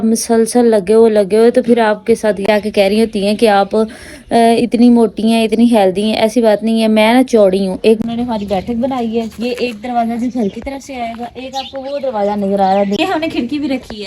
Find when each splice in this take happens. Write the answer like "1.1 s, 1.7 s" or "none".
2.5 s, 8.0 s, 13.0 s